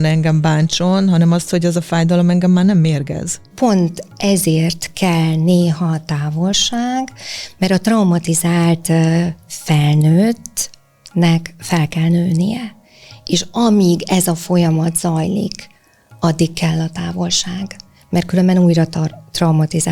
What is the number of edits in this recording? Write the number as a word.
one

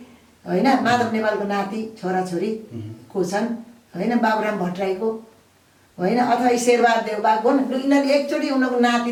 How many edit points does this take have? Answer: zero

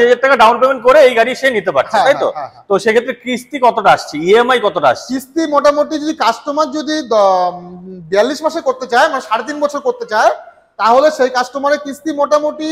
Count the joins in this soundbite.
zero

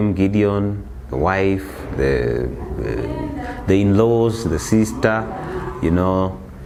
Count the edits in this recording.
zero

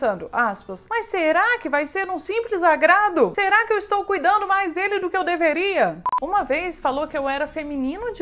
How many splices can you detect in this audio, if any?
one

